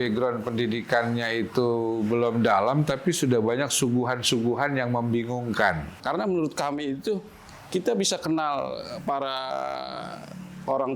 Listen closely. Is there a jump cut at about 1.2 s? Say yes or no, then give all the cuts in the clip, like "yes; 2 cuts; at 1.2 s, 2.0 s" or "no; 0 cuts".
no; 1 cut; at 6.0 s